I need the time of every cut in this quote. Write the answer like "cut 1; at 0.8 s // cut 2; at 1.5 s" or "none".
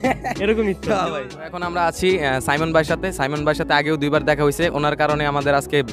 cut 1; at 1.3 s